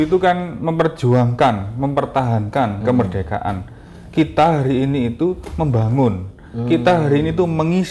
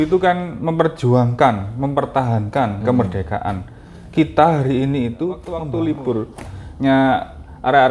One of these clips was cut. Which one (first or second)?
second